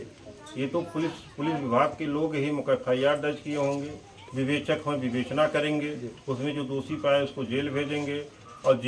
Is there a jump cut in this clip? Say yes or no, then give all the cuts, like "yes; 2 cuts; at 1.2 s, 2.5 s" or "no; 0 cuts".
no; 0 cuts